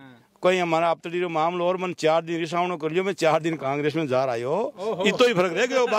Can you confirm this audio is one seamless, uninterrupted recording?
yes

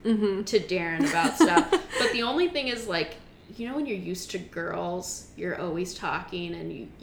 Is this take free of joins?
yes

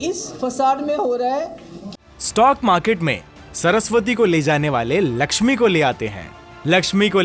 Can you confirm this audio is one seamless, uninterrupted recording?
no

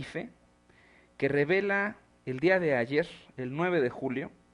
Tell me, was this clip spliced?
yes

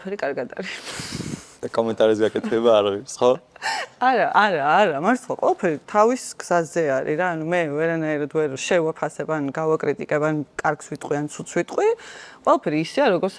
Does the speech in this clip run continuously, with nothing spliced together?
no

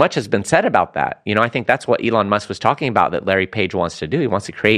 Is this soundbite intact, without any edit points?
yes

